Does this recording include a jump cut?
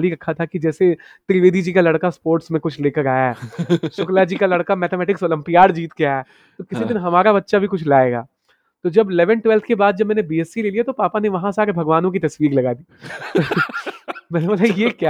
no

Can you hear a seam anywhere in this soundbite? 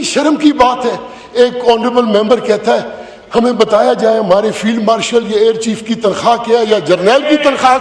no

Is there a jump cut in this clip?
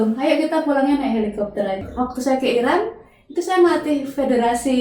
yes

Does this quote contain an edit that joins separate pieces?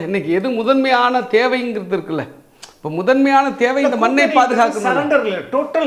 no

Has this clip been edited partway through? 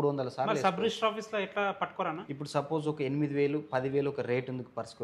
yes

